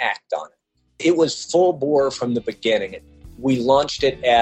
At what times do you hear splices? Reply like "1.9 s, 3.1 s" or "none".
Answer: 0.9 s, 3.2 s